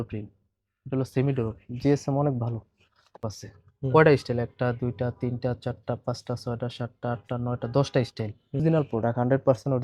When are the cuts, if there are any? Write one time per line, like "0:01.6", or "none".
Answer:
0:03.3
0:08.6